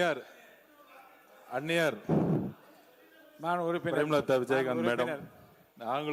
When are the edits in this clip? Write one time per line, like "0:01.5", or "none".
none